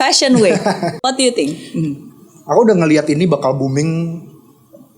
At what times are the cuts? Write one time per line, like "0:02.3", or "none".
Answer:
0:00.9